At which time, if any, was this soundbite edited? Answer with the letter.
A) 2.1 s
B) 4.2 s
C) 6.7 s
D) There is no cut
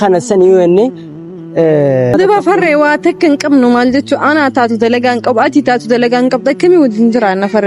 A